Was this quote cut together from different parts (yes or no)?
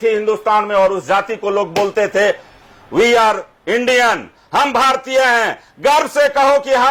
no